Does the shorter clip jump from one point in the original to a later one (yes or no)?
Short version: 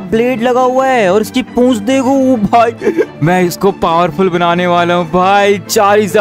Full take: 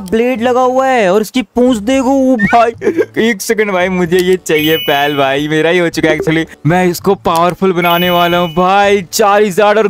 yes